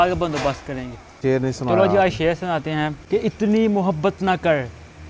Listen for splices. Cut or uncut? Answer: cut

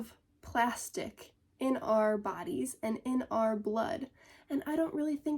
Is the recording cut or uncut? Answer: uncut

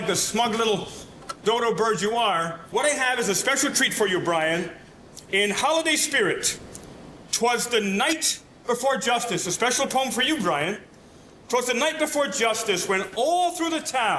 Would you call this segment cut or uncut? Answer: cut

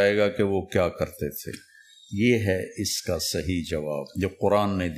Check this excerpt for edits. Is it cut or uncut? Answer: cut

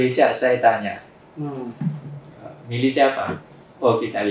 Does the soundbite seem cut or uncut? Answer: uncut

